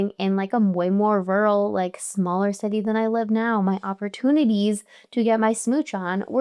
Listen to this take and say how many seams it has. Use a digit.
0